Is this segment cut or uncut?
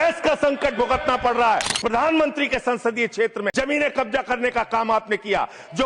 cut